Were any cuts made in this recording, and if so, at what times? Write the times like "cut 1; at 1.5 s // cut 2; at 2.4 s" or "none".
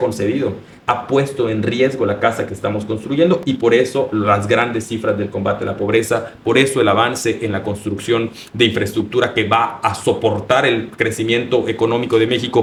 none